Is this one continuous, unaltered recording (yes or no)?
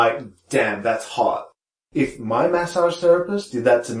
no